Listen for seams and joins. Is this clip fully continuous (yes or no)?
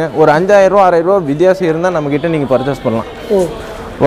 yes